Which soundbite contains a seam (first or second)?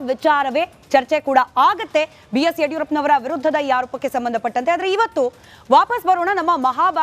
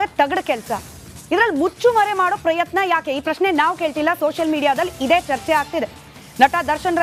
first